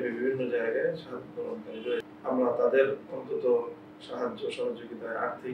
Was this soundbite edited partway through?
yes; 1 cut; at 2.1 s

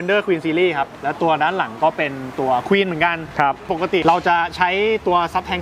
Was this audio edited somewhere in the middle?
yes; 2 cuts; at 0.9 s, 3.6 s

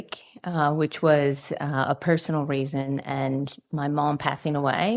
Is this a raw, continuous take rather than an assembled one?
yes; 0 cuts

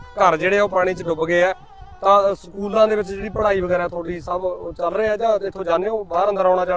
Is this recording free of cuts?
yes; 0 cuts

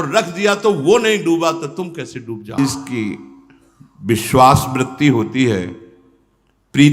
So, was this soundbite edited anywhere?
yes; 1 cut; at 2.6 s

